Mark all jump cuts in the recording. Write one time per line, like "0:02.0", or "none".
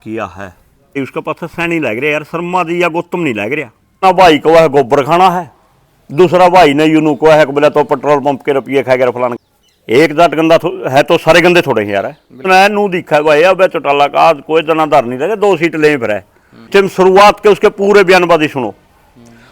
0:01.0
0:04.0
0:09.3
0:12.4
0:16.7